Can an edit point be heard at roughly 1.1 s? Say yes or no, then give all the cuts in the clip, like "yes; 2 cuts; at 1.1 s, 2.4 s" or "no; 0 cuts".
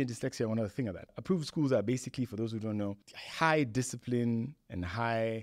yes; 1 cut; at 1.1 s